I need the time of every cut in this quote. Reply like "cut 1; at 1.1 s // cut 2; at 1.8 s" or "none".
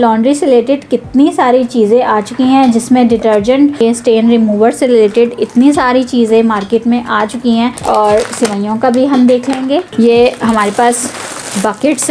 cut 1; at 3.7 s // cut 2; at 7.8 s